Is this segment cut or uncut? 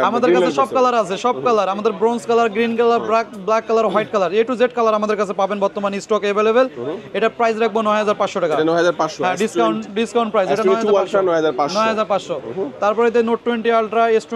uncut